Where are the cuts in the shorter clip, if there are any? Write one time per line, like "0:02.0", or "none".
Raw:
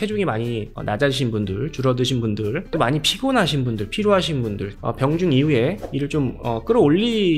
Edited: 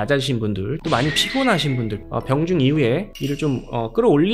0:00.8
0:02.0